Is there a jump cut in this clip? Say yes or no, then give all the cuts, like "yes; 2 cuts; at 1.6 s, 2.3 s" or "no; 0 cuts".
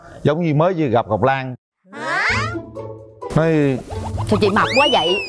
no; 0 cuts